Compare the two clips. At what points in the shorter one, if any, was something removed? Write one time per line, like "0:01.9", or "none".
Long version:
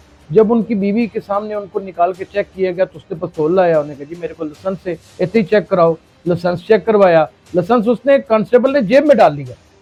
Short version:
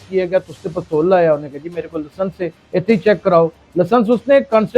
0:03.6